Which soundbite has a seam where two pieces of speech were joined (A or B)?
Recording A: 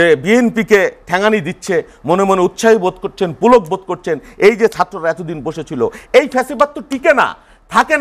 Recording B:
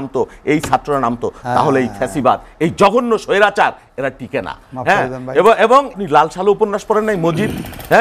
B